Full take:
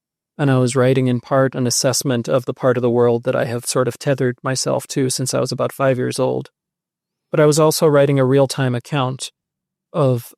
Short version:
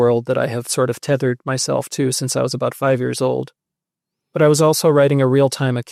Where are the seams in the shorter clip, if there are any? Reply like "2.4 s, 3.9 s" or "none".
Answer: none